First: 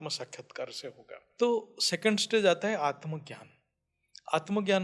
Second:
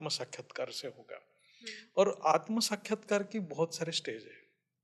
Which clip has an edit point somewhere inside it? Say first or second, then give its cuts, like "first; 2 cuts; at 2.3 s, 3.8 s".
first; 1 cut; at 1.2 s